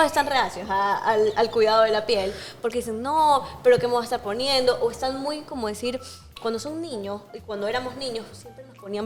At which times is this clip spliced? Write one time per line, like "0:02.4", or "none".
none